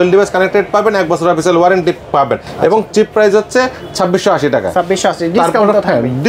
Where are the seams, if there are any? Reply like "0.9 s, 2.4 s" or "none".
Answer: none